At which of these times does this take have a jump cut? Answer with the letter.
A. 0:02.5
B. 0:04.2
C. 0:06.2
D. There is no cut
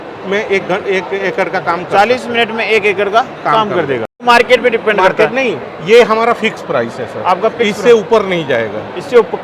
B